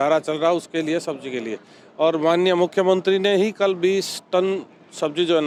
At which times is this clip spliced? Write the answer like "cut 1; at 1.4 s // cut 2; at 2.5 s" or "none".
none